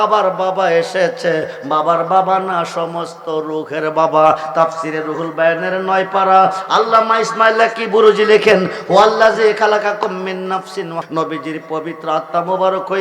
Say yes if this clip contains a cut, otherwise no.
yes